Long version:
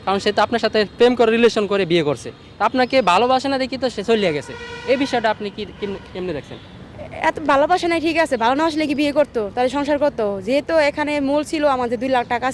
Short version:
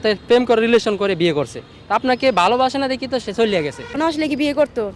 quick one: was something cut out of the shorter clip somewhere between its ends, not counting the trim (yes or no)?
yes